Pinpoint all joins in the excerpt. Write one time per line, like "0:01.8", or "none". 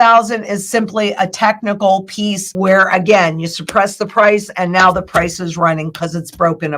0:02.4